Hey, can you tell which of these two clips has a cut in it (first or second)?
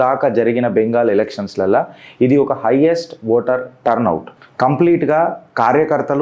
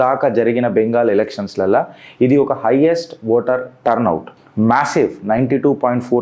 first